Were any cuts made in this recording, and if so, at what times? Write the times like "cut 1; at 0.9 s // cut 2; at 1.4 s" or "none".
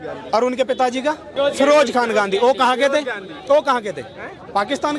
cut 1; at 1.3 s